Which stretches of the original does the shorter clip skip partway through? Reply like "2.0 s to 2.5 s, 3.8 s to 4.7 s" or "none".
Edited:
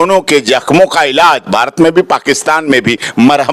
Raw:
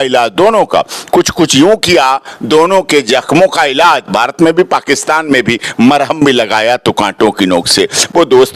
none